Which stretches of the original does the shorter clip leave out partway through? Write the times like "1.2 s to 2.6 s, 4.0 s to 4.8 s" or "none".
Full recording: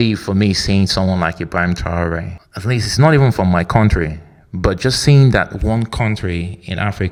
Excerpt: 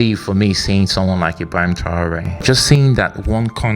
2.4 s to 4.8 s